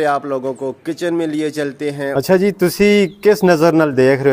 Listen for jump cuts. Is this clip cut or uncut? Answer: cut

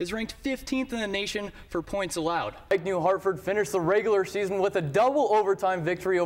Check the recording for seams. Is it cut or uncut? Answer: cut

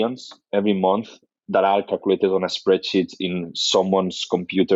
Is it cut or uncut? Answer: uncut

